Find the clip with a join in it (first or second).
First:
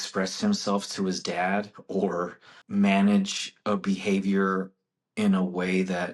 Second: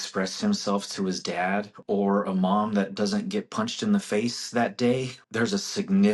second